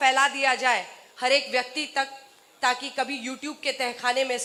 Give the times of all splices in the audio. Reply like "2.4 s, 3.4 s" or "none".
none